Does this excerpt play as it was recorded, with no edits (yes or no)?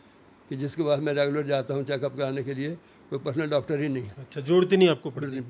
yes